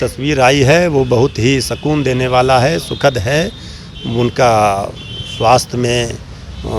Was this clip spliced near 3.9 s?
no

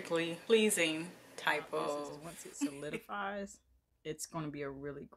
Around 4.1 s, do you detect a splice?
no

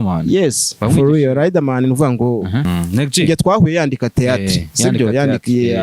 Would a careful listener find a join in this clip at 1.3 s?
no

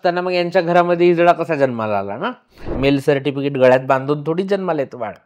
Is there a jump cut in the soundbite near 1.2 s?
no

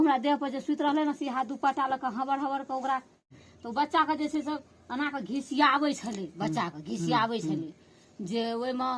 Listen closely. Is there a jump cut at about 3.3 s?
yes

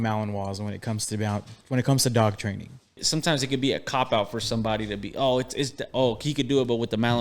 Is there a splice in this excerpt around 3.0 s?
yes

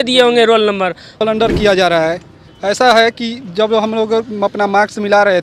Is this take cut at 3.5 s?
no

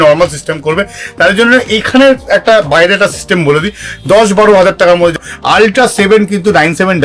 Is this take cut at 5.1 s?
yes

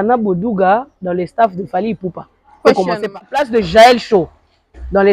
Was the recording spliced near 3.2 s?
yes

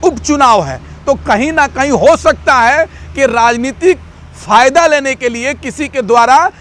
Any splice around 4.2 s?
no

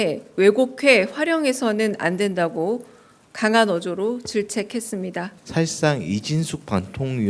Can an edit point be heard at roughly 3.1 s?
no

